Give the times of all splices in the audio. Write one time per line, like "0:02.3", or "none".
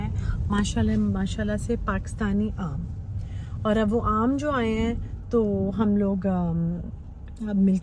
none